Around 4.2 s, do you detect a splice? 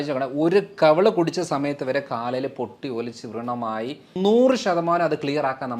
yes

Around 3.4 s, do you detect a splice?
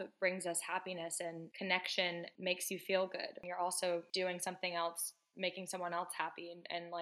yes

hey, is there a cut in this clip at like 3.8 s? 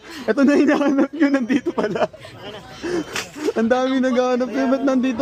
no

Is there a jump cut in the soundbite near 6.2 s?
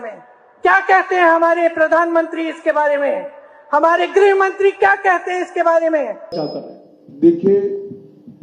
yes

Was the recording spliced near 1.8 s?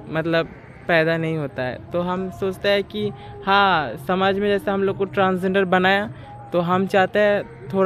no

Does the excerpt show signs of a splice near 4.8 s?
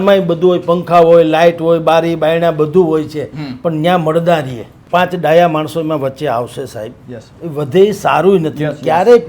yes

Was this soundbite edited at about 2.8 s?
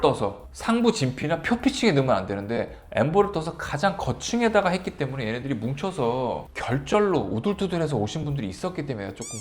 no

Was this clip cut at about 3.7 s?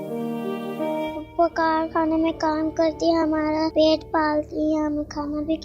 yes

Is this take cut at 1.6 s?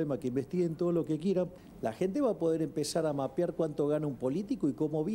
yes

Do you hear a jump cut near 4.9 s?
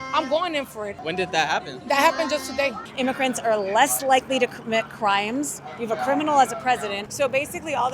no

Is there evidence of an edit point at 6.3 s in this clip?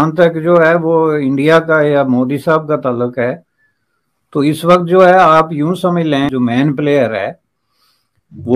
yes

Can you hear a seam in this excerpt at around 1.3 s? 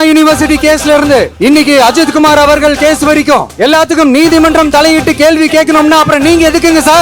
yes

